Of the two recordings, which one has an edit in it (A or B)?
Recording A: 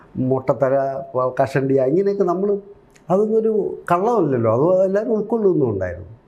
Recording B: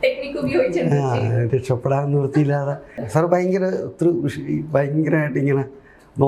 B